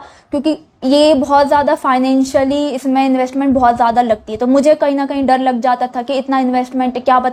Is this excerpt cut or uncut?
uncut